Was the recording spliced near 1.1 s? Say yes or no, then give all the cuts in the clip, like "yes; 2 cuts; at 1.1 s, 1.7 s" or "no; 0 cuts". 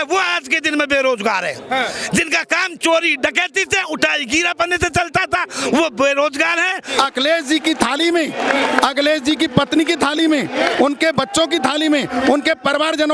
no; 1 cut; at 6.9 s